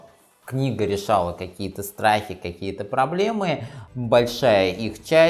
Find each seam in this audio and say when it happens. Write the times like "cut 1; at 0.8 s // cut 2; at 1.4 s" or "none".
cut 1; at 3.8 s